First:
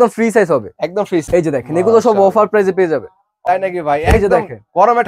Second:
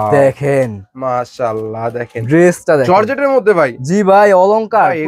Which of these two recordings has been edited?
first; 2 cuts; at 1.2 s, 3.4 s

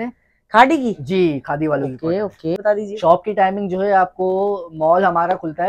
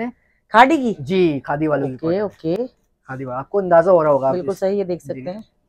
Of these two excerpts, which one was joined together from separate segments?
first; 1 cut; at 2.6 s

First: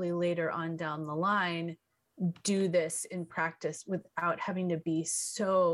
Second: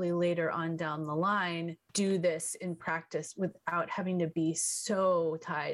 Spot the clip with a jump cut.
second; 1 cut; at 1.9 s

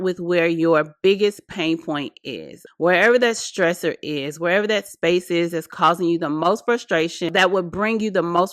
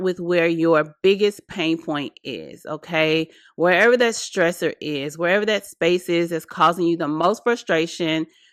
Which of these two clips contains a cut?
first; 2 cuts; at 2.6 s, 7.3 s

